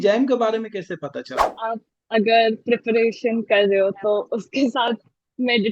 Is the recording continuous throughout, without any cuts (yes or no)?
no